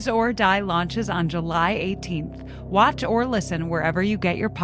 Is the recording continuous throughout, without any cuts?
yes; 0 cuts

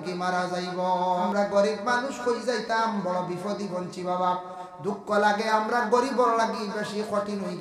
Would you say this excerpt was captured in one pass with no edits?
no; 1 cut; at 1.3 s

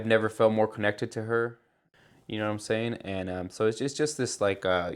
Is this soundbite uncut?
no; 1 cut; at 1.9 s

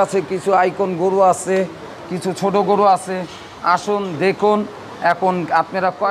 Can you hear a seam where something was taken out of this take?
no; 0 cuts

